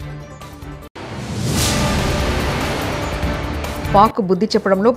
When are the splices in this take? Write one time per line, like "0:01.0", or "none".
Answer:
0:01.0
0:03.9

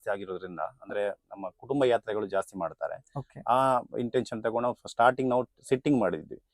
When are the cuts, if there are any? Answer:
none

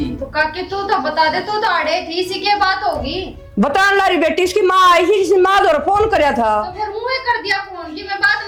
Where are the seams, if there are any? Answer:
none

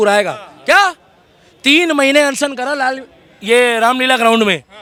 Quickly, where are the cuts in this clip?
none

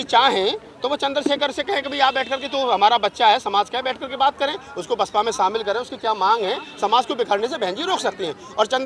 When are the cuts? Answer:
none

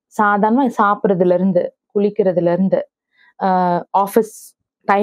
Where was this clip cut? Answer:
none

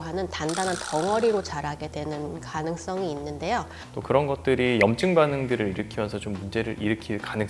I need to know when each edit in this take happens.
0:03.8

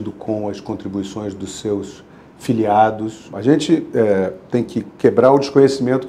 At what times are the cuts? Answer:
0:03.3

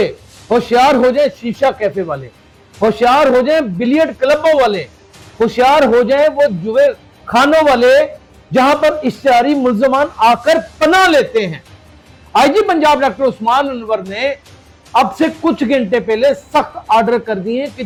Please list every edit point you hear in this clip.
none

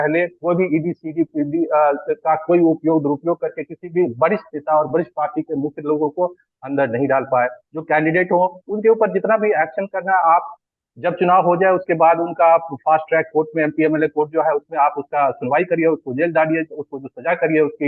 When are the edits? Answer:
none

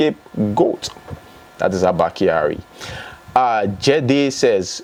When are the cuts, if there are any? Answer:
none

